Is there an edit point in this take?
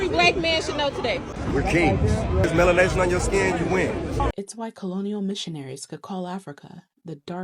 yes; 2 cuts; at 1.3 s, 4.3 s

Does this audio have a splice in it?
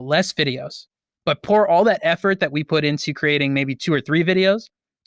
yes; 1 cut; at 1.4 s

